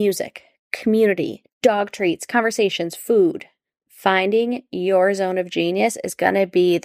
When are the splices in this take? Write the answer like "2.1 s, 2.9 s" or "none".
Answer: 1.4 s